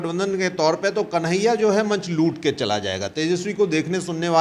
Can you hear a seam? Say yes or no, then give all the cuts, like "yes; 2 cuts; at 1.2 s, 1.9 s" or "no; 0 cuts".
no; 0 cuts